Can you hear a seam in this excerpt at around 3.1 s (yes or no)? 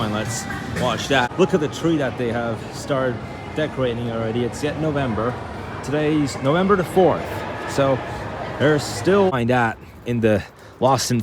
no